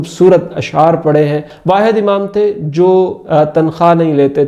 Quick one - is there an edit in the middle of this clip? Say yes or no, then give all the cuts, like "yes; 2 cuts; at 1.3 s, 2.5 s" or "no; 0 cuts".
yes; 1 cut; at 1.5 s